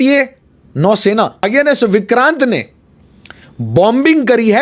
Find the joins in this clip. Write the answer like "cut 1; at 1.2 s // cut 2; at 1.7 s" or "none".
cut 1; at 1.4 s